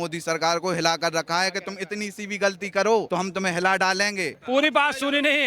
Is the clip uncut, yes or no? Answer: no